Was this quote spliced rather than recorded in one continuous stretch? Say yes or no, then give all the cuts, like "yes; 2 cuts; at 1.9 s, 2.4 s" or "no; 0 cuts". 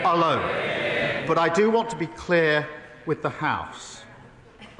yes; 1 cut; at 1.2 s